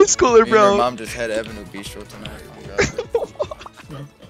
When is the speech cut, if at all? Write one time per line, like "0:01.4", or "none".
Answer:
none